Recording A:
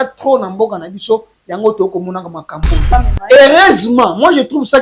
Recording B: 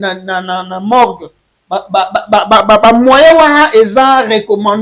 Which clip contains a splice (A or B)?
A